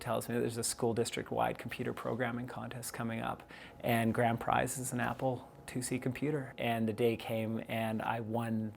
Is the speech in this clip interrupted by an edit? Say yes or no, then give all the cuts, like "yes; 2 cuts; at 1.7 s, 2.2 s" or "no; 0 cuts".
yes; 1 cut; at 6.5 s